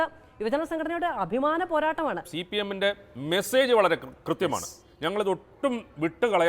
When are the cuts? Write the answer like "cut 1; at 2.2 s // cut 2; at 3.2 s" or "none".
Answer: cut 1; at 2.3 s